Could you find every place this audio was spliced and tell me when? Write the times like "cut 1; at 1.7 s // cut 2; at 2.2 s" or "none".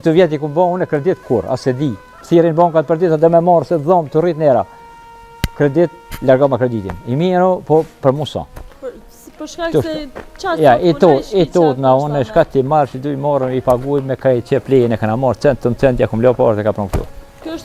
none